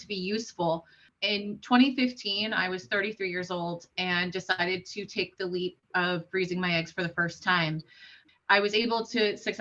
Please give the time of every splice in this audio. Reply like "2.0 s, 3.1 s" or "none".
1.1 s, 8.2 s

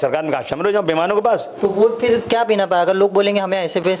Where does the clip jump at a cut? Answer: 1.5 s

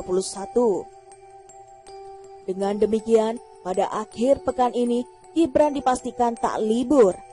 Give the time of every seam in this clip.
0.8 s, 2.4 s

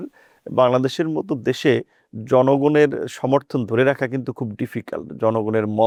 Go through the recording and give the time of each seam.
none

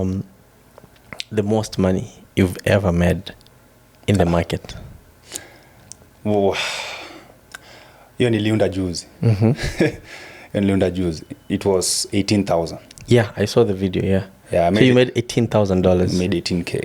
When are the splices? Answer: none

